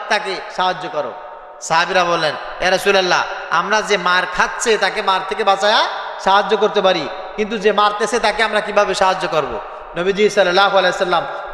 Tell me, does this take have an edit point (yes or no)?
no